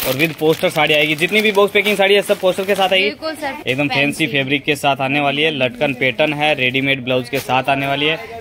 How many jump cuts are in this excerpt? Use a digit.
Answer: 1